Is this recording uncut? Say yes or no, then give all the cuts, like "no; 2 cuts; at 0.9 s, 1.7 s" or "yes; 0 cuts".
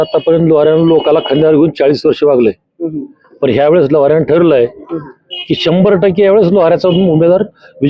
yes; 0 cuts